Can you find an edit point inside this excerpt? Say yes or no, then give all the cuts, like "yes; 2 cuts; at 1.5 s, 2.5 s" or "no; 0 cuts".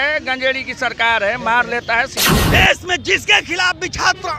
yes; 1 cut; at 2.3 s